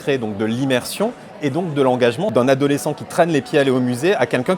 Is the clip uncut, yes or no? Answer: no